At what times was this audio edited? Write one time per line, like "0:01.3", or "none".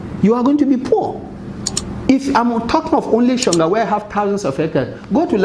0:01.7